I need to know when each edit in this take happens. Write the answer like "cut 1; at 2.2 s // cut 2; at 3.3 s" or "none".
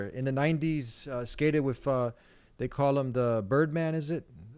none